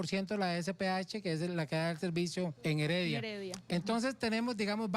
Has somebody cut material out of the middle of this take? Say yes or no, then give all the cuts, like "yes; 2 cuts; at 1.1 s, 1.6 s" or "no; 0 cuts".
yes; 1 cut; at 2.6 s